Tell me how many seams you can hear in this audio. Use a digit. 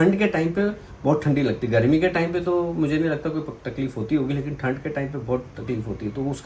0